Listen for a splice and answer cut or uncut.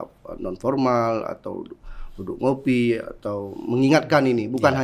uncut